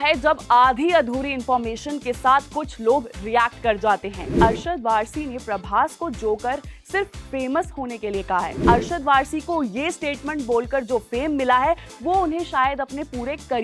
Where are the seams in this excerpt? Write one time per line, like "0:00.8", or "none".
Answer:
0:04.3
0:08.6